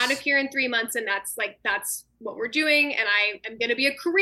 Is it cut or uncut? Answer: uncut